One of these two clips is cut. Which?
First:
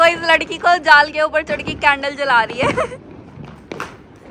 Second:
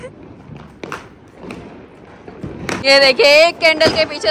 second; 1 cut; at 2.8 s

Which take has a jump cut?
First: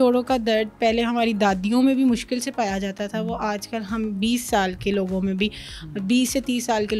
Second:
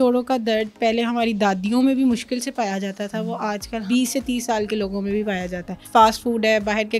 second; 2 cuts; at 3.8 s, 5.8 s

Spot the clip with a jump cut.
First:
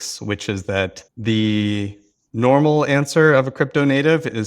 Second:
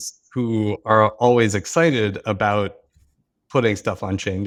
first; 1 cut; at 1.1 s

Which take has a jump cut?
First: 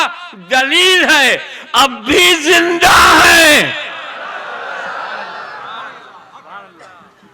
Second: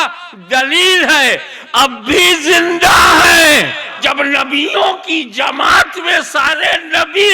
second; 1 cut; at 4.0 s

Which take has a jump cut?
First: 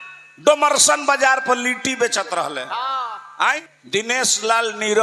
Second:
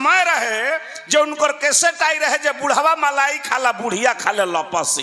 first; 1 cut; at 3.7 s

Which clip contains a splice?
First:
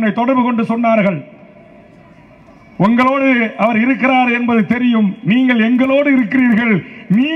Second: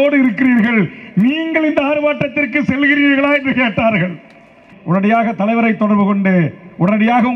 second; 1 cut; at 4.7 s

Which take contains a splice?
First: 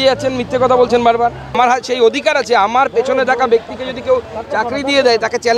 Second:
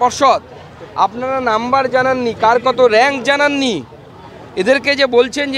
first; 1 cut; at 1.5 s

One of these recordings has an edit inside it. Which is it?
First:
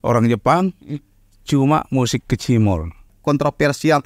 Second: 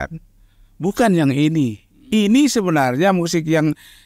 first; 1 cut; at 3.1 s

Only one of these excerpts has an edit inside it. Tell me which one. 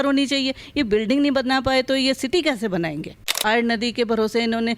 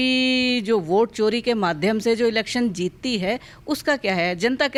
first; 1 cut; at 3.4 s

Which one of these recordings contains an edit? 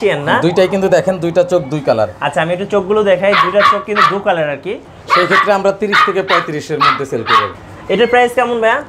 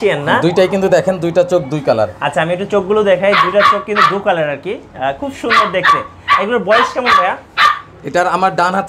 first; 2 cuts; at 4.9 s, 7.6 s

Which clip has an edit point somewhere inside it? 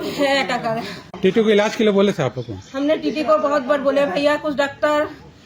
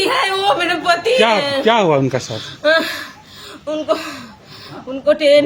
first; 1 cut; at 0.9 s

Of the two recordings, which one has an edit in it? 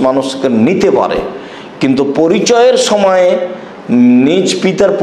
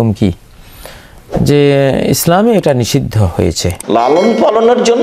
second; 1 cut; at 3.8 s

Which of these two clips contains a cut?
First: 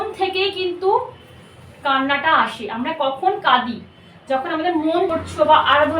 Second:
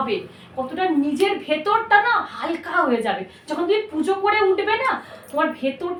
first; 1 cut; at 5.1 s

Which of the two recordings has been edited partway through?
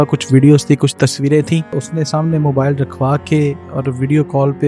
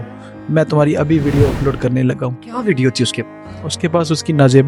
first; 1 cut; at 1.8 s

